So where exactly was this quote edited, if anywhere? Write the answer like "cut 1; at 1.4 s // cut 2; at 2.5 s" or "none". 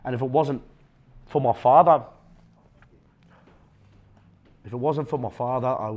none